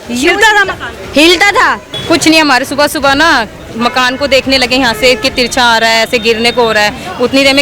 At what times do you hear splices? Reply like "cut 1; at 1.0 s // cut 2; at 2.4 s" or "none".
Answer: cut 1; at 1.9 s